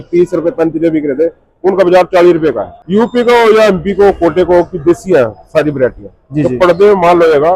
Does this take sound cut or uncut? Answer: cut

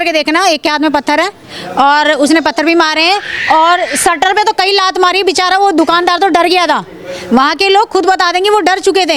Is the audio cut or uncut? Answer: uncut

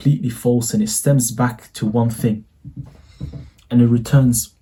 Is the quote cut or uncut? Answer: uncut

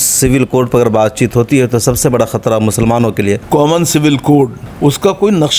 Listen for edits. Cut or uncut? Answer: cut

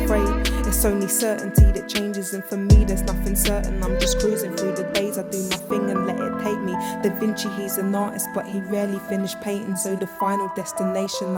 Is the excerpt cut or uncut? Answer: uncut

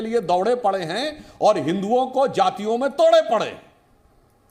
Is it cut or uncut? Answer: uncut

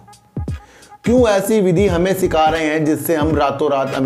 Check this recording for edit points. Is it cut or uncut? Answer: uncut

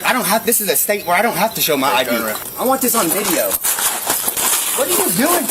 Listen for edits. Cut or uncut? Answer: cut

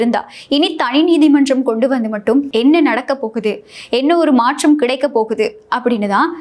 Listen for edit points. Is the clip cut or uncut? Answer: uncut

